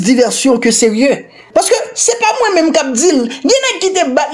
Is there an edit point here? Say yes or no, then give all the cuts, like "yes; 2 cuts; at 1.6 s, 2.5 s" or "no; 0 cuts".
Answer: yes; 1 cut; at 1.3 s